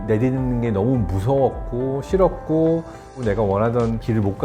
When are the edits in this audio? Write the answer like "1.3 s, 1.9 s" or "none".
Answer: 3.1 s